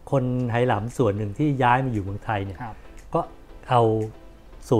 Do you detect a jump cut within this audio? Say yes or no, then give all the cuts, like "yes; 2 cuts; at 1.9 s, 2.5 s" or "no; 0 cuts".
no; 0 cuts